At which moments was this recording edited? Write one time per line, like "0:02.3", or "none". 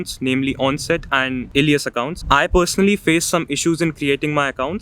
0:01.4
0:02.2